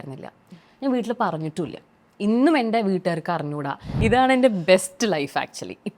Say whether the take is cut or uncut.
cut